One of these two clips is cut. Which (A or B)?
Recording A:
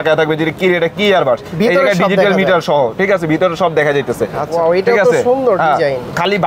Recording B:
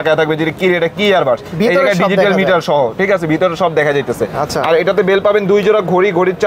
A